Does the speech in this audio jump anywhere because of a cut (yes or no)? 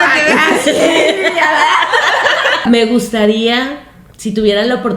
yes